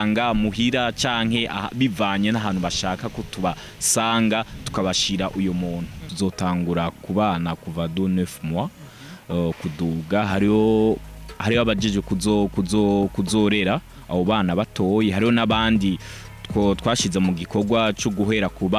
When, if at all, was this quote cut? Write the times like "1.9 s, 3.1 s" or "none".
6.1 s